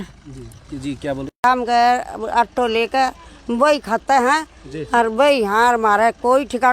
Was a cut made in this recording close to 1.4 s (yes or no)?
yes